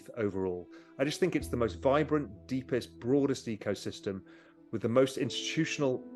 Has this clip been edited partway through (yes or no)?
no